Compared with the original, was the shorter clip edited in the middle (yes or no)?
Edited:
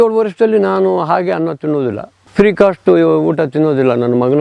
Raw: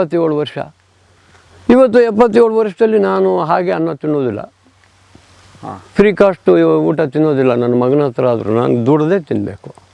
yes